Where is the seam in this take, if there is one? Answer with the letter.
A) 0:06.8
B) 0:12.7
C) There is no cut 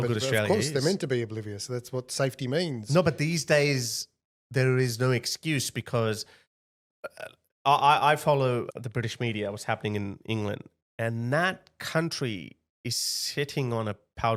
C